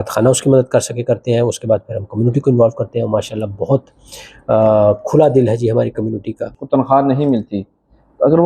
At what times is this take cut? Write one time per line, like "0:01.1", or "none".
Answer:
0:06.5